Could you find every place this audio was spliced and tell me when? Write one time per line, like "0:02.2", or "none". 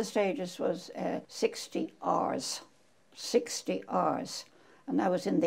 0:01.3